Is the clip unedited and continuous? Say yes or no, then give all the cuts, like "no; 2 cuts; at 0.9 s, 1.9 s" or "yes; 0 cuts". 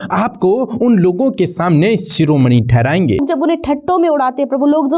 no; 1 cut; at 3.2 s